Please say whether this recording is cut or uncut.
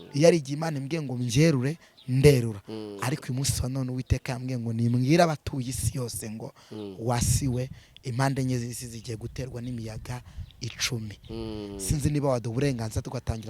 uncut